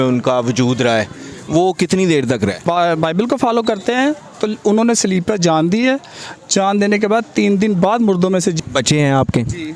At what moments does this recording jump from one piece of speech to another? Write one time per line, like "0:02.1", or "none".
0:02.6
0:08.6